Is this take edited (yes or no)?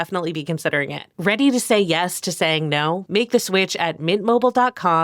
yes